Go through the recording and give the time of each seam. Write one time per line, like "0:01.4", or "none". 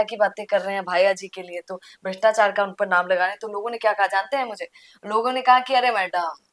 none